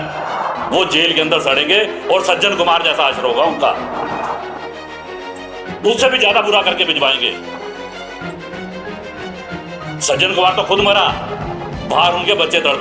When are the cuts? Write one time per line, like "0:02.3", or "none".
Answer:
none